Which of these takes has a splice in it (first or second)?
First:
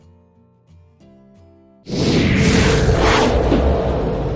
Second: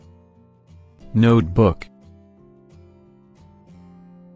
second